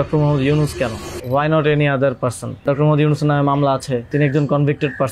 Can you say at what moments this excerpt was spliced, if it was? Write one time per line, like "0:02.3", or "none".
0:01.1
0:02.6
0:04.1